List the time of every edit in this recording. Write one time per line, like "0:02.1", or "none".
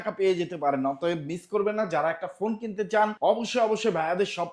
0:03.1